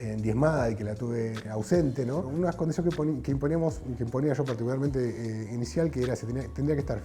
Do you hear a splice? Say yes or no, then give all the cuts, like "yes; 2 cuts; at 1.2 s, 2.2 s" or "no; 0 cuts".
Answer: yes; 2 cuts; at 1.4 s, 2.3 s